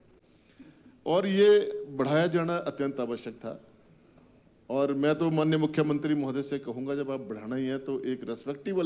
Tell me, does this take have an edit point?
no; 0 cuts

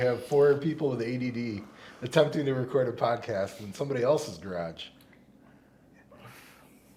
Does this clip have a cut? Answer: no; 0 cuts

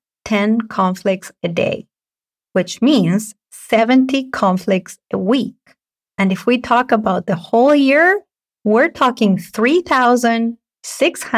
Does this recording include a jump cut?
no; 0 cuts

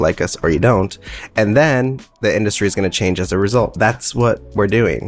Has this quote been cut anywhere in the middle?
yes; 1 cut; at 4.0 s

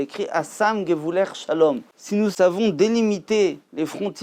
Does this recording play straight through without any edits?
no; 1 cut; at 2.3 s

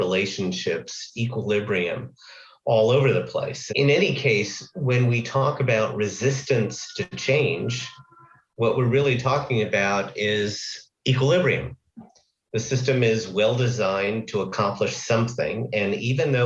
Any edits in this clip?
yes; 2 cuts; at 3.6 s, 7.1 s

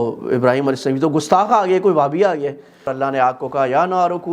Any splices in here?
yes; 1 cut; at 2.9 s

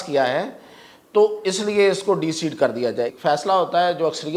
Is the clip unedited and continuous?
no; 1 cut; at 3.1 s

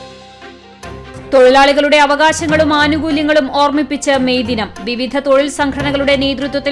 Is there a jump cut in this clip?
yes; 1 cut; at 1.2 s

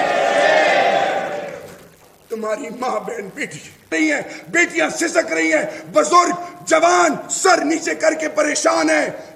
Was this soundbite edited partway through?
yes; 1 cut; at 3.9 s

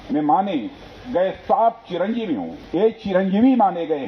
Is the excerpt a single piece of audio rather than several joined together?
no; 1 cut; at 2.6 s

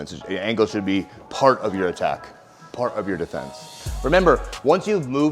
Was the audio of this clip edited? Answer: yes; 1 cut; at 3.9 s

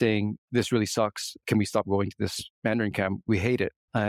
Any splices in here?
no; 0 cuts

